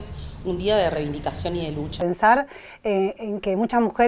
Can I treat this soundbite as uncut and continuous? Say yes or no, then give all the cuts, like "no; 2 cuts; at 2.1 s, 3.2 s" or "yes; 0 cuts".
no; 1 cut; at 2.0 s